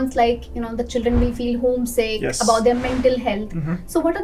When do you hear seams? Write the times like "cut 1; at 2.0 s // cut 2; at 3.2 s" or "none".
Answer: none